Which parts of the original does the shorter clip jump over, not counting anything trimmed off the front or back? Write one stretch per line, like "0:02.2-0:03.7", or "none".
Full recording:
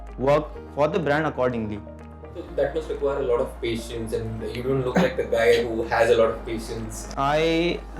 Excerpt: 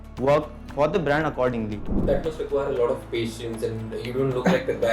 0:01.9-0:02.4